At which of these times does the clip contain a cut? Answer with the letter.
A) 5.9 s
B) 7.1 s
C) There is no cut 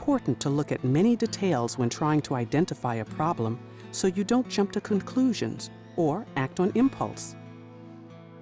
B